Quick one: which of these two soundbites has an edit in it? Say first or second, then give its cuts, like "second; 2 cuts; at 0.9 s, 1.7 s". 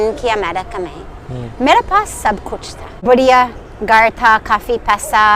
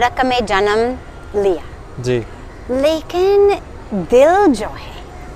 first; 1 cut; at 3.0 s